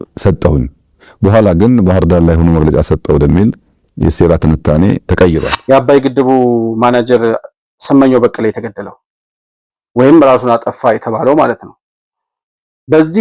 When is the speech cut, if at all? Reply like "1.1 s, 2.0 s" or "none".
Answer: 5.5 s